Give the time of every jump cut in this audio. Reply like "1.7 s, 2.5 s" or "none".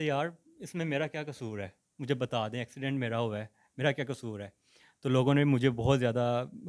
none